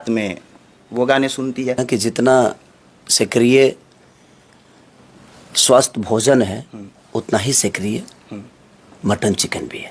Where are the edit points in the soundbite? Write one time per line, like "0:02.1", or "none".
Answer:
0:01.8